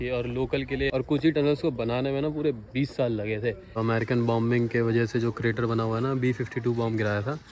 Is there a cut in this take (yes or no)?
yes